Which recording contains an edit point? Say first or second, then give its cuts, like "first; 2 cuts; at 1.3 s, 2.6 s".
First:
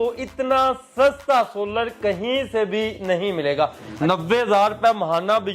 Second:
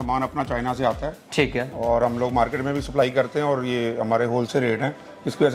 first; 1 cut; at 3.8 s